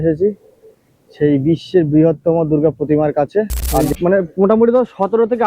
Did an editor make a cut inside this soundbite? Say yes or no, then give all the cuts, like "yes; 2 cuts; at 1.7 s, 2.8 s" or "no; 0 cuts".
yes; 1 cut; at 3.9 s